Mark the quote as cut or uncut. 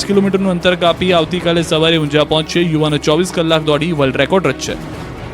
cut